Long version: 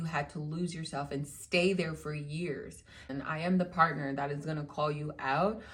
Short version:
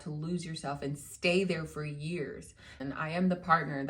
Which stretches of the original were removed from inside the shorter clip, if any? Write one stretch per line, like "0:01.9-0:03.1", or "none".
none